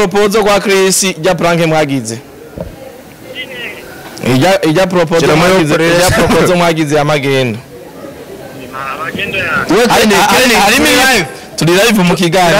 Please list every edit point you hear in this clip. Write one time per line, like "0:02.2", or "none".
none